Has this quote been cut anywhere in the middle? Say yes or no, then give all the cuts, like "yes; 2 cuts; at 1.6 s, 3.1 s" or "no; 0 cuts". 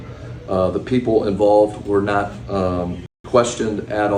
no; 0 cuts